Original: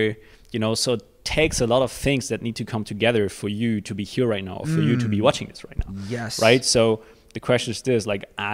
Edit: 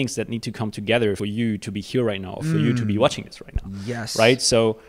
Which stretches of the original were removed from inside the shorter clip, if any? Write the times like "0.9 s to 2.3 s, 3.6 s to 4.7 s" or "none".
3.3 s to 3.4 s